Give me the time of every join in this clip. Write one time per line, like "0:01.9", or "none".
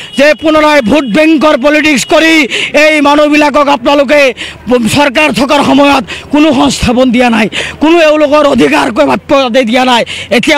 none

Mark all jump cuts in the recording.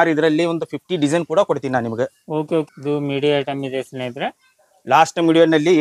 0:02.7

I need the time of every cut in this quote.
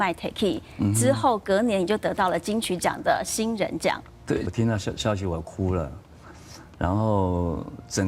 0:04.5

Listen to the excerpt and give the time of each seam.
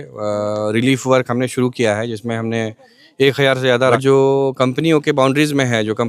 0:04.0

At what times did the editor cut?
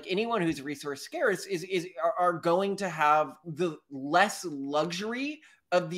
none

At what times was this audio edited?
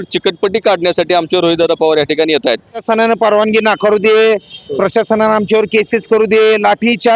0:02.8

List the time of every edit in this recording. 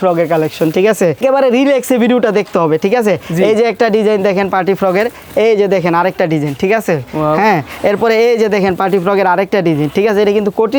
none

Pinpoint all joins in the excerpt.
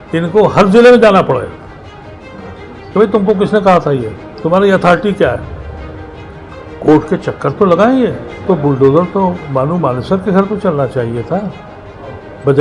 0:08.3

